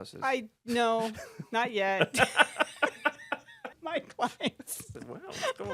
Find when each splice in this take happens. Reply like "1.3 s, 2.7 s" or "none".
3.7 s